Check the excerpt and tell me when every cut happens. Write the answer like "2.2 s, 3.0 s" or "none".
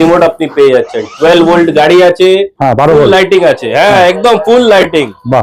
none